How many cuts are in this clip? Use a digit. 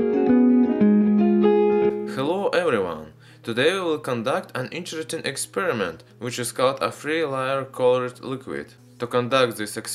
0